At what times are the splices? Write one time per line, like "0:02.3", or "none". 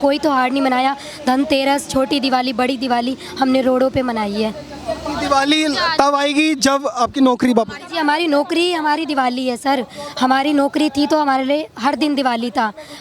none